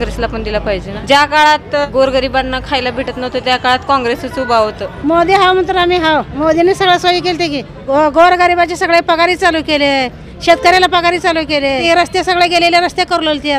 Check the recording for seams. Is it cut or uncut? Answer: cut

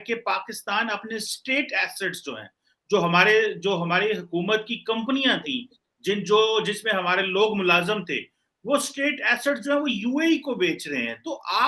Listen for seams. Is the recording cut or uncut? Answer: uncut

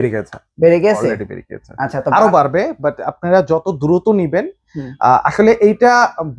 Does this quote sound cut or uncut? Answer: uncut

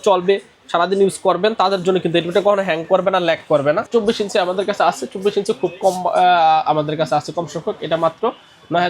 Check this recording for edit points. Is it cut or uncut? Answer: cut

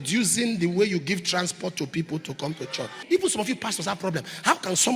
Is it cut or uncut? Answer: cut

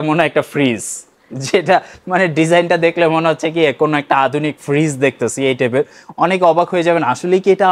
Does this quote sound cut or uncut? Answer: uncut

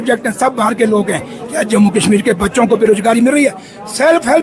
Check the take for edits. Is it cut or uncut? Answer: uncut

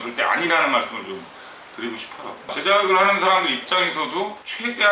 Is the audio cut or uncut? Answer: uncut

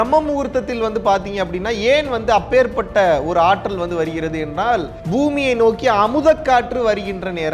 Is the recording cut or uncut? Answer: cut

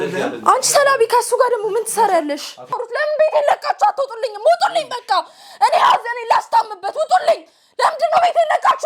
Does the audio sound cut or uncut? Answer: cut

